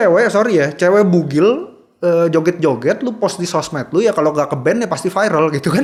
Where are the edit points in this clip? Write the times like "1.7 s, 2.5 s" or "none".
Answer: none